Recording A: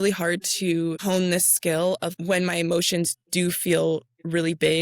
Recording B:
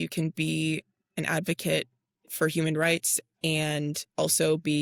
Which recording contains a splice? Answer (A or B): A